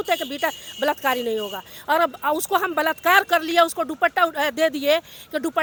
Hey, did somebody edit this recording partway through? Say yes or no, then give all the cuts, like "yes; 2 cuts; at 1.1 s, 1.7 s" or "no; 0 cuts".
no; 0 cuts